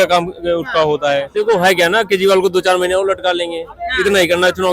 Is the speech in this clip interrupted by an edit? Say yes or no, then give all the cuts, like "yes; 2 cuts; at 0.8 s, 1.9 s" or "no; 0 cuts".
yes; 1 cut; at 1.3 s